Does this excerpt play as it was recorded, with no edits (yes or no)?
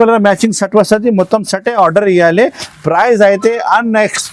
yes